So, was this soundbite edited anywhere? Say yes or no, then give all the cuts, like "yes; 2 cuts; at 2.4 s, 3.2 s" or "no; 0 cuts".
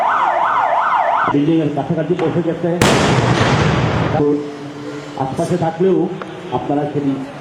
yes; 1 cut; at 1.2 s